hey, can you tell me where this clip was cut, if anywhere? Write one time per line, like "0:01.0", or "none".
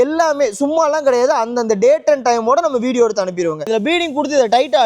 0:03.7